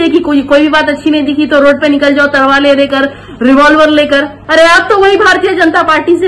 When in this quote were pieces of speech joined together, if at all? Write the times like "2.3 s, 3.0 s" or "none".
4.4 s